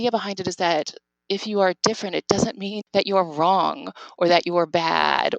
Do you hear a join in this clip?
yes; 1 cut; at 2.7 s

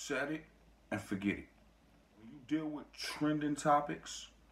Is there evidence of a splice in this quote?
yes; 1 cut; at 2.4 s

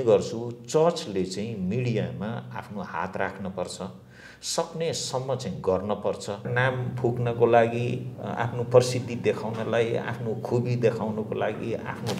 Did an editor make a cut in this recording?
yes; 1 cut; at 6.5 s

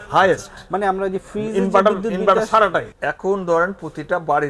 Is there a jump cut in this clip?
yes; 1 cut; at 2.9 s

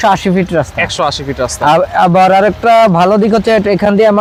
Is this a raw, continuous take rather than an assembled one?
yes; 0 cuts

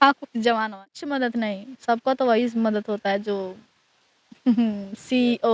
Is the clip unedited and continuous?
no; 1 cut; at 1.0 s

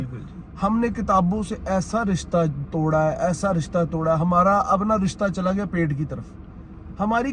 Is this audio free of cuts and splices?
yes; 0 cuts

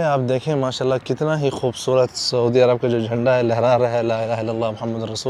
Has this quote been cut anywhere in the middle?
no; 0 cuts

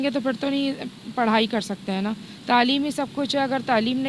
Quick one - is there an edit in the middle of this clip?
no; 0 cuts

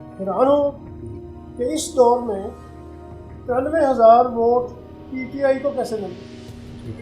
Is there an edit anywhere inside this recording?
no; 0 cuts

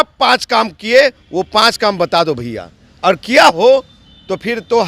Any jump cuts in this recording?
no; 0 cuts

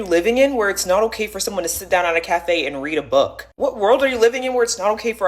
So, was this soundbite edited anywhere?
no; 0 cuts

